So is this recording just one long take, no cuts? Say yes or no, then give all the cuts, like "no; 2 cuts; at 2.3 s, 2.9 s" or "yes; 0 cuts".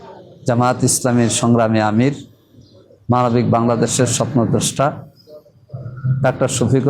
yes; 0 cuts